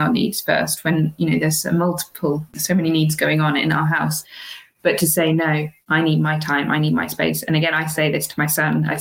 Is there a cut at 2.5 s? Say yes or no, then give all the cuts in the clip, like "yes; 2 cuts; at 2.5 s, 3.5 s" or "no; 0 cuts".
yes; 2 cuts; at 2.5 s, 5.8 s